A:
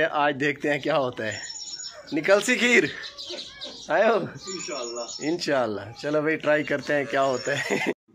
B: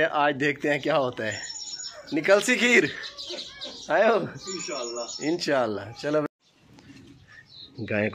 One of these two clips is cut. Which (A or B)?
B